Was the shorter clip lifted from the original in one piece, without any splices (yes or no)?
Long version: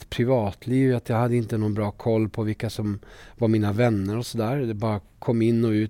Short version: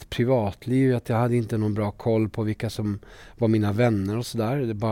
yes